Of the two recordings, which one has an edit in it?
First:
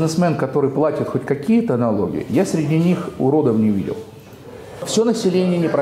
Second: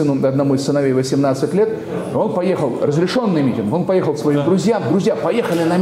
first; 1 cut; at 4.8 s

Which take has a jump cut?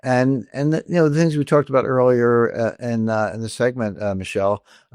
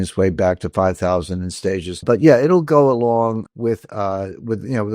second; 2 cuts; at 2.0 s, 3.5 s

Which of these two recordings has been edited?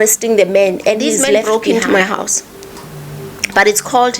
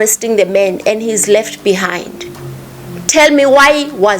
first; 1 cut; at 1.4 s

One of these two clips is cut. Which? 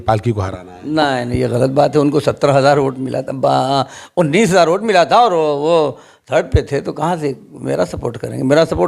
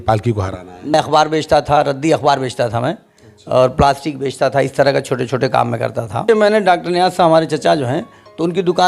second; 2 cuts; at 0.9 s, 6.2 s

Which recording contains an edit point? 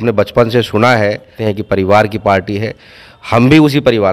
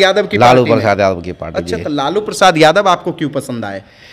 first; 1 cut; at 1.3 s

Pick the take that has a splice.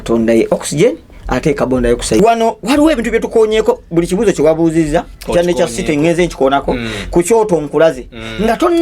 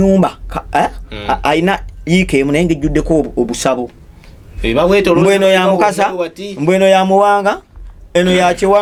first; 1 cut; at 2.2 s

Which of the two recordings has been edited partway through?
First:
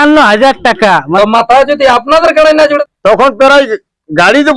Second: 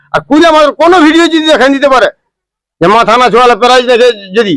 first; 2 cuts; at 1.1 s, 2.8 s

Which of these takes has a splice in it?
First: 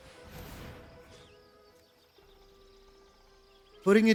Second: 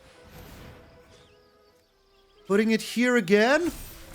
second; 1 cut; at 2.0 s

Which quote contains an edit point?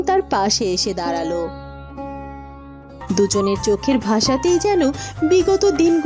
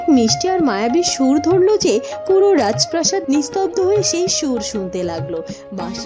first; 1 cut; at 3.0 s

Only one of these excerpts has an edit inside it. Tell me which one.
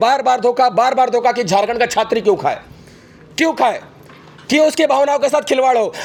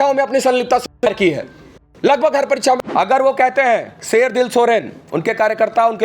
second; 1 cut; at 2.9 s

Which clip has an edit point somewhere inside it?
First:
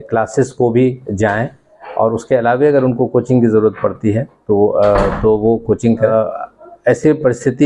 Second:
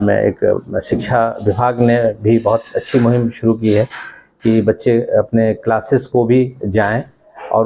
first; 1 cut; at 6.1 s

